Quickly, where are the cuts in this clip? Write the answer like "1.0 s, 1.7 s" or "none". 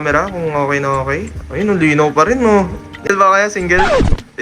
2.6 s